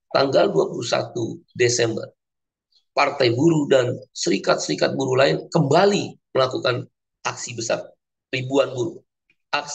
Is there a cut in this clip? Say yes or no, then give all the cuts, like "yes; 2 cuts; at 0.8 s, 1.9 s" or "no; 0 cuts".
yes; 2 cuts; at 2.3 s, 4.0 s